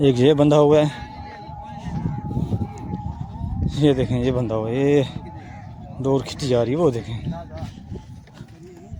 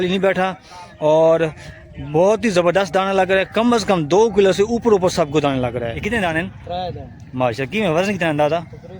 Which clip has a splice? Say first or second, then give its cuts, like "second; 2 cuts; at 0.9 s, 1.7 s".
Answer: second; 1 cut; at 5.9 s